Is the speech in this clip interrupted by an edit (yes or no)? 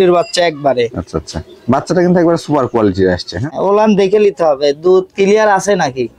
yes